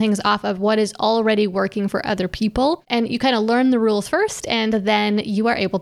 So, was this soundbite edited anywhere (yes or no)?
yes